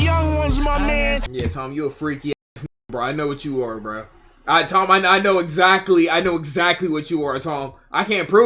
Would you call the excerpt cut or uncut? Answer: uncut